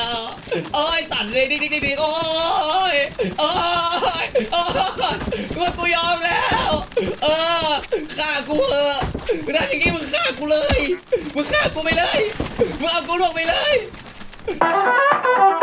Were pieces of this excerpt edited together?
yes; 1 cut; at 14.6 s

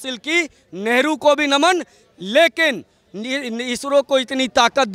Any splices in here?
no; 0 cuts

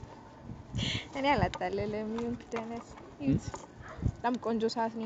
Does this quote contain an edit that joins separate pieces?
no; 0 cuts

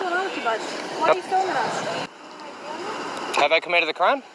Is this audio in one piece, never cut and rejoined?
no; 1 cut; at 2.1 s

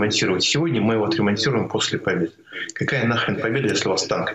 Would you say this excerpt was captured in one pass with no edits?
yes; 0 cuts

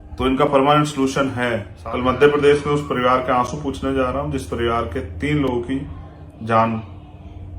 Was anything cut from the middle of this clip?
yes; 1 cut; at 1.7 s

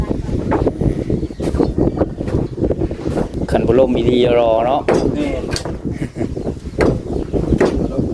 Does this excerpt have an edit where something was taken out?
no; 0 cuts

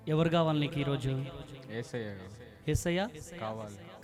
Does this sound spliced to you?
no; 0 cuts

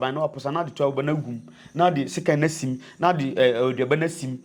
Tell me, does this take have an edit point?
no; 0 cuts

